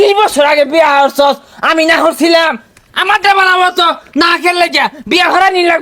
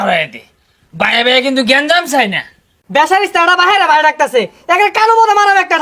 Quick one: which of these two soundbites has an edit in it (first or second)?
second